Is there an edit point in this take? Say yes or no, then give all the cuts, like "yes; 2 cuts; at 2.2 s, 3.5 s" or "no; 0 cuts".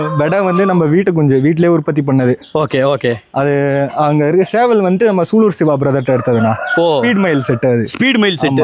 no; 0 cuts